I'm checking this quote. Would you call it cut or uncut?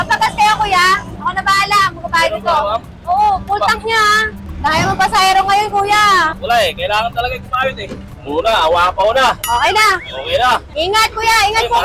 cut